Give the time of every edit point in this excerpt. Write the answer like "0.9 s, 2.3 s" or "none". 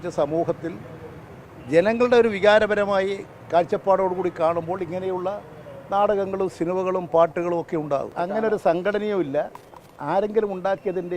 8.1 s